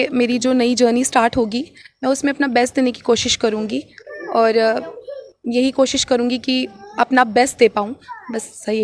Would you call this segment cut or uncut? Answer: uncut